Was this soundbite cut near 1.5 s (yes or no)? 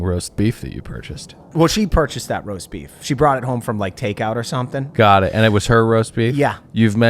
yes